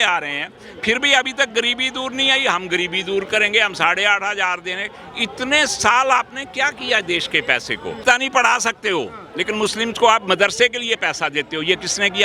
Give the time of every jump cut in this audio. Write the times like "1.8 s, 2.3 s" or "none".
8.0 s

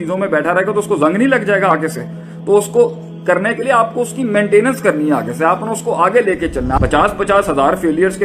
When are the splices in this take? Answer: 6.8 s

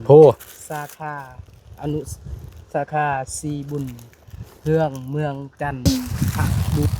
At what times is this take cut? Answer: 5.9 s

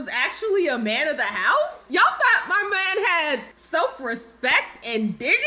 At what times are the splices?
1.8 s, 3.5 s

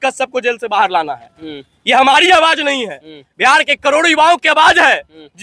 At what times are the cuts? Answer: none

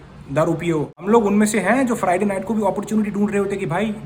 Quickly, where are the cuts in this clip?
1.0 s

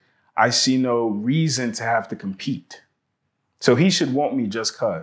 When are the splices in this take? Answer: none

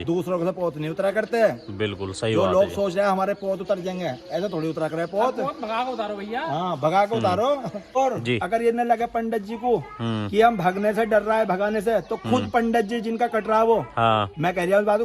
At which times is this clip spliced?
7.9 s

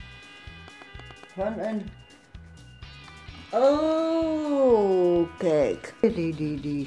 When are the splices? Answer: 1.9 s, 3.3 s, 6.0 s

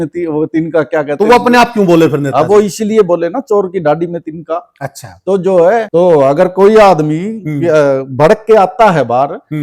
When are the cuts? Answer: 5.9 s

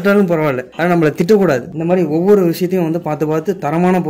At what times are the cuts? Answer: 1.7 s

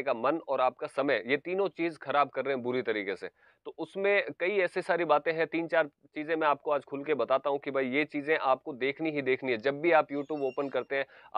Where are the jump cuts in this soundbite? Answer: none

